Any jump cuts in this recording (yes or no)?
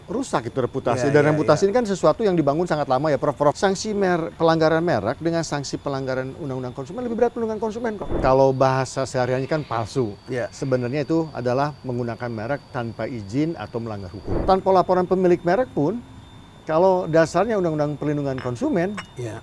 yes